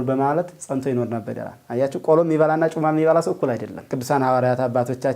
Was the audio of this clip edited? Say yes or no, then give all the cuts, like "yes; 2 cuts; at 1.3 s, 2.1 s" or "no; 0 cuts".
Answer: yes; 1 cut; at 3.9 s